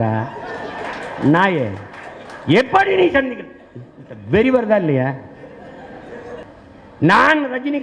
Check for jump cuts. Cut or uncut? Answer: cut